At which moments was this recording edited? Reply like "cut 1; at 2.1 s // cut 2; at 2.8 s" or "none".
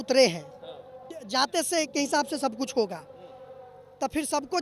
cut 1; at 1.1 s